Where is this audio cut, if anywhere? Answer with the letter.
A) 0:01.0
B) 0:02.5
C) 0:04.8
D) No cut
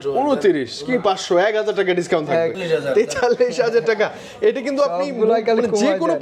B